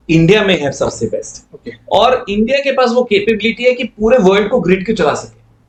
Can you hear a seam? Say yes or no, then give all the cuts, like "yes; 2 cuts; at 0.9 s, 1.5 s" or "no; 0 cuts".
no; 0 cuts